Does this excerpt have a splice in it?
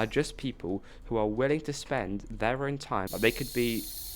yes; 1 cut; at 3.1 s

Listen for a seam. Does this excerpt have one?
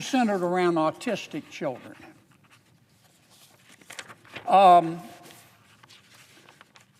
no; 0 cuts

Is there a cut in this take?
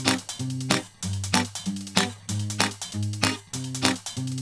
yes; 1 cut; at 3.4 s

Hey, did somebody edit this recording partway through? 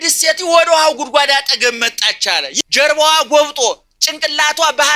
yes; 1 cut; at 2.5 s

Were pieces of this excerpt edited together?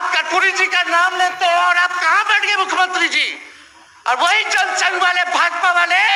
no; 0 cuts

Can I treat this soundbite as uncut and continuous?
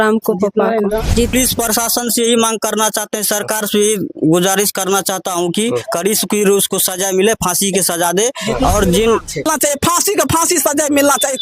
no; 2 cuts; at 1.3 s, 9.5 s

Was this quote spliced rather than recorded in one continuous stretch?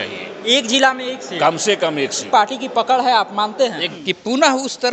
yes; 2 cuts; at 2.2 s, 3.8 s

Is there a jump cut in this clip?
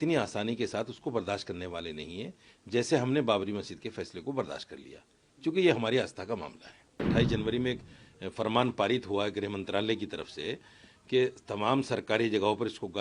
yes; 1 cut; at 7.0 s

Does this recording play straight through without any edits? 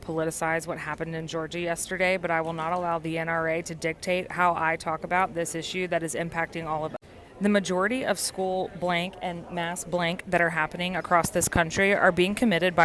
yes; 0 cuts

